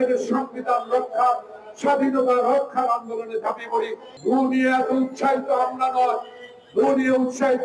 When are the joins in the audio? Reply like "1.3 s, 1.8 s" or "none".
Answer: 4.0 s